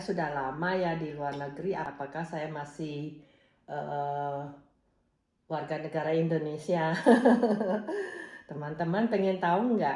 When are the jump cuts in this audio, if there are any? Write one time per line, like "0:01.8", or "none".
0:01.9